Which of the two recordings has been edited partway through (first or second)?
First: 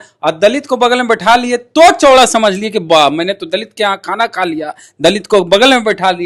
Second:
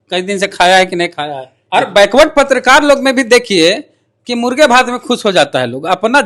second